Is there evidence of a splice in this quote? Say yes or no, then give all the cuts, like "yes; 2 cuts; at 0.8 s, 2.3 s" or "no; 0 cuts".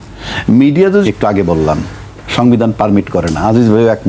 yes; 1 cut; at 1.1 s